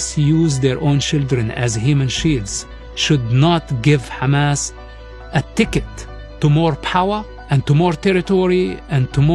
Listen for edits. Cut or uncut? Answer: uncut